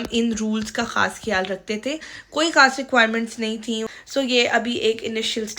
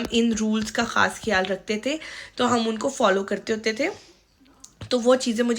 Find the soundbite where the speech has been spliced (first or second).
first